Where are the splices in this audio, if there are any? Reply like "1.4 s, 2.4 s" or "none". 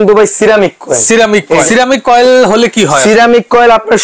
1.6 s